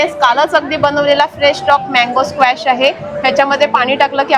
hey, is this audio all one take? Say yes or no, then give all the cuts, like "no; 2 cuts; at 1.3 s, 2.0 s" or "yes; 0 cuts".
yes; 0 cuts